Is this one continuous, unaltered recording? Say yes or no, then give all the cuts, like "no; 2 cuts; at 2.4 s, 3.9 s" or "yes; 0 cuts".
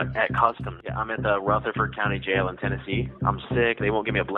yes; 0 cuts